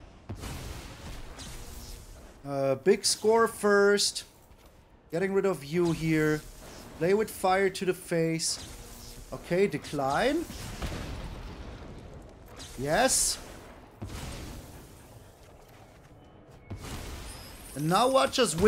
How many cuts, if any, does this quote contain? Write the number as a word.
one